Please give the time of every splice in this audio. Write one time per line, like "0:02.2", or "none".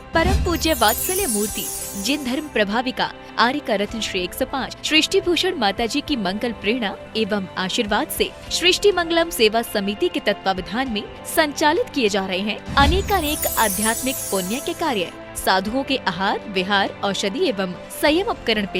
0:04.8